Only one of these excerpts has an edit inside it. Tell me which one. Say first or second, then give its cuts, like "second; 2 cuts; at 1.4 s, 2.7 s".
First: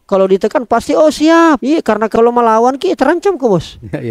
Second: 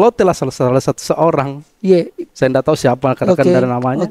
first; 1 cut; at 2.0 s